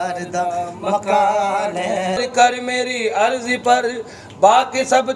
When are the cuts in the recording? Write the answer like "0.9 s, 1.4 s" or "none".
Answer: 2.2 s